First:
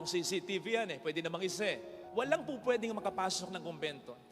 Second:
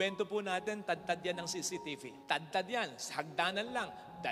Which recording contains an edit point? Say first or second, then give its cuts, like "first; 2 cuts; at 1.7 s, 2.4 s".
first; 1 cut; at 1.9 s